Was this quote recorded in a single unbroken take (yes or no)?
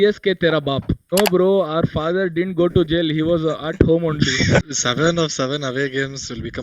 no